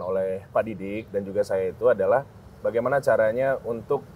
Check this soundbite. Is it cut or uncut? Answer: uncut